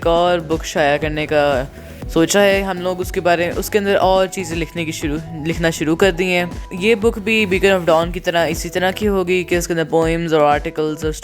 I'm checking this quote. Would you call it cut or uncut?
uncut